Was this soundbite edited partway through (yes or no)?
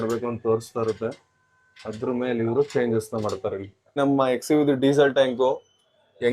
yes